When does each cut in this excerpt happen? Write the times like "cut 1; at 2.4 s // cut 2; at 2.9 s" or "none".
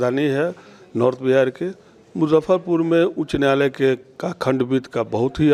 none